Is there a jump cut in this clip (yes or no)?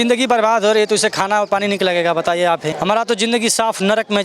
yes